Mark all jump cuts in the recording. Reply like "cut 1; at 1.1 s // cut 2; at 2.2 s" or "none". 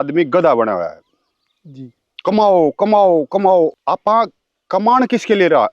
cut 1; at 3.7 s